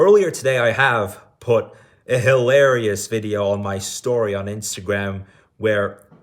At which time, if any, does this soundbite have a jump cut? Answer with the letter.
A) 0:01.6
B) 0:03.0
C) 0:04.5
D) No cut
D